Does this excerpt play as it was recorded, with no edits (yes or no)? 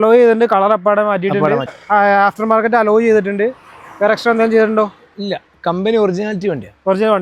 no